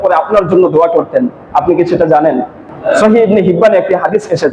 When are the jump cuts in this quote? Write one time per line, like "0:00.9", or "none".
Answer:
0:02.5